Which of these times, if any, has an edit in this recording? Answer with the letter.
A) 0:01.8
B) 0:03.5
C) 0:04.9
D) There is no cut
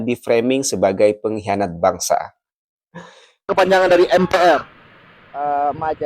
B